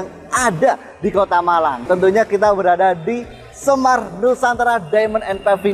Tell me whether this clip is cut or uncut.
cut